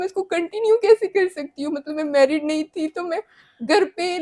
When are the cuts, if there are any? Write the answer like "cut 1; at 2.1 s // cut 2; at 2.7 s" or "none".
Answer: none

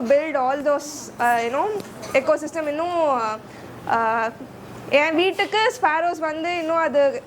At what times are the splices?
none

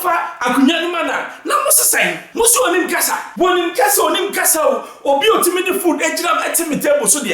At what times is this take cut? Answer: cut 1; at 2.2 s // cut 2; at 3.2 s

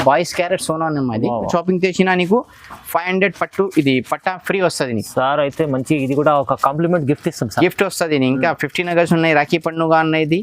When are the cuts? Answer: cut 1; at 1.5 s

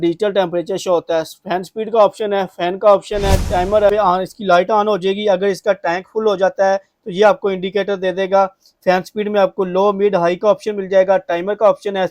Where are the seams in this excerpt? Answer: cut 1; at 3.9 s

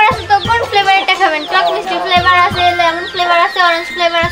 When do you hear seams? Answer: none

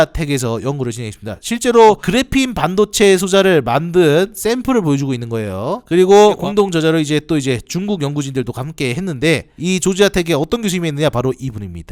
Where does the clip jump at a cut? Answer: none

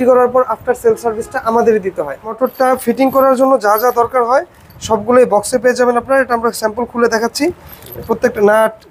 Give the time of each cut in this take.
cut 1; at 2.2 s

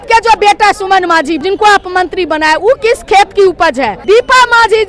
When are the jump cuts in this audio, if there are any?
cut 1; at 1.4 s // cut 2; at 4.0 s

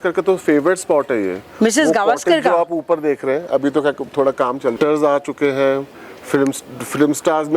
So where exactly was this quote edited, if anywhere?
cut 1; at 4.8 s

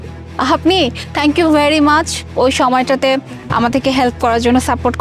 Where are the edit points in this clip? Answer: none

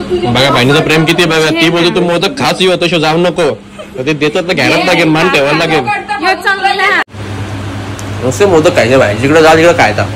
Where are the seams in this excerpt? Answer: cut 1; at 7.1 s

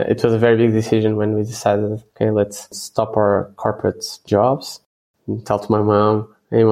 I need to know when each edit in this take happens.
none

